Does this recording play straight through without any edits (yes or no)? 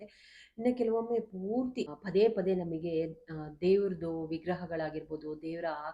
no